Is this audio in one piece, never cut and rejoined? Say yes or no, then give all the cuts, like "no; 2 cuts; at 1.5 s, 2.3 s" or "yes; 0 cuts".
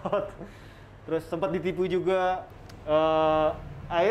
no; 1 cut; at 2.5 s